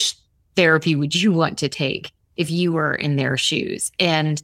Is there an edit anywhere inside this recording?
no; 0 cuts

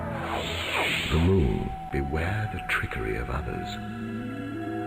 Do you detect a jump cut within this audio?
yes; 1 cut; at 1.2 s

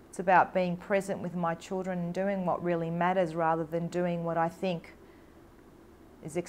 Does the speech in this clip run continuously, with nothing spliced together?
yes; 0 cuts

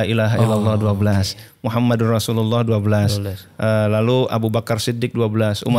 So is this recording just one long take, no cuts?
yes; 0 cuts

